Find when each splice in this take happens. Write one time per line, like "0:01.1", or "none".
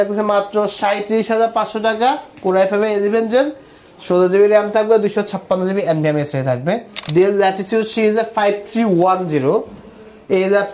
0:06.9